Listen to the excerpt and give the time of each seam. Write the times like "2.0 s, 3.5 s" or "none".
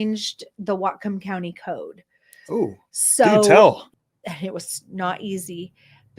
3.9 s